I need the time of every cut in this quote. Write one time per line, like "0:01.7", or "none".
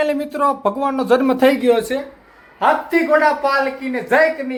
none